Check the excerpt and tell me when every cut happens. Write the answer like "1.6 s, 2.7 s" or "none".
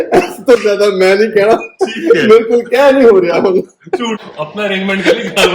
4.2 s